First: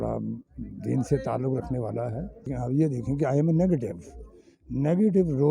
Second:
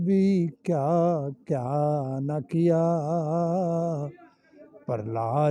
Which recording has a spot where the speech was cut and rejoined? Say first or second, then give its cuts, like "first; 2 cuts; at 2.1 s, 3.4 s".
first; 1 cut; at 2.5 s